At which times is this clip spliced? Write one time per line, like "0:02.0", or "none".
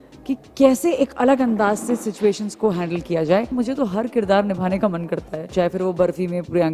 0:03.5
0:05.5

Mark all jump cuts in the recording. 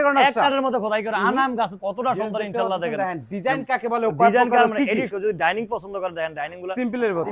0:01.8
0:05.1

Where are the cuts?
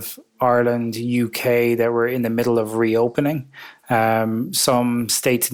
none

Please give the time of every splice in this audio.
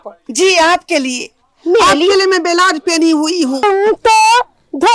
0:03.6

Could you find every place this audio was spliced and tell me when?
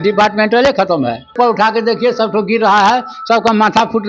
0:01.3

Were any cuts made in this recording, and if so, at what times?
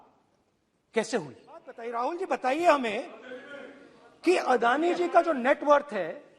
0:01.8

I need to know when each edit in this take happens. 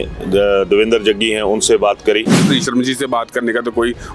0:02.4

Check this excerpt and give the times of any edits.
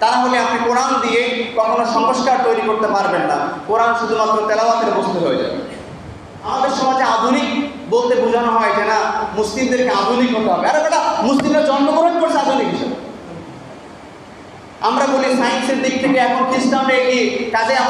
0:06.4

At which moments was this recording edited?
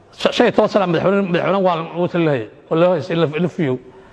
none

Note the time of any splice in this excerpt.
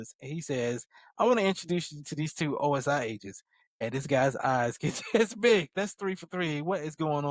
0:05.8

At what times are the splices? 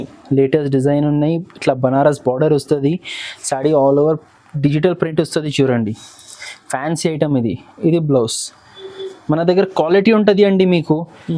none

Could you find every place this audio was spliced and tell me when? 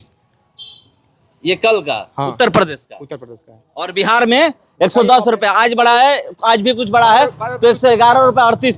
none

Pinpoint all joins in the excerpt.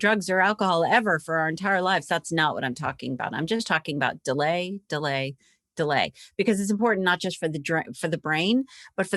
none

